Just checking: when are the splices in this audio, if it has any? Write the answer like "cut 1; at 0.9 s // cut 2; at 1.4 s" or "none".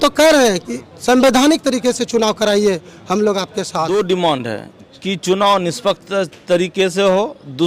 cut 1; at 3.9 s